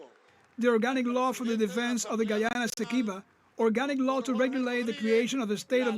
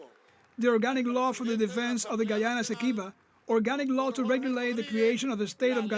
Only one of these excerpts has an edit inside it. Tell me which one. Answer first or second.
second